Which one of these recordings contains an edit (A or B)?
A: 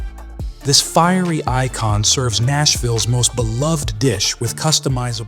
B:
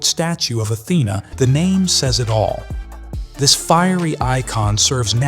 B